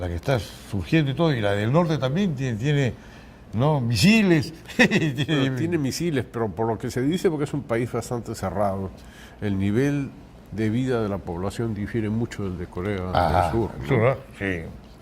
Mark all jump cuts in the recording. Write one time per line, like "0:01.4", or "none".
0:06.5